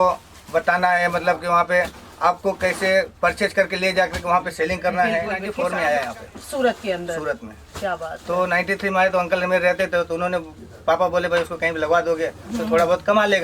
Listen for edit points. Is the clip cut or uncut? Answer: cut